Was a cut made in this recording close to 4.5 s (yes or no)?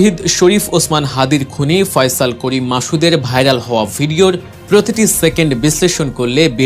yes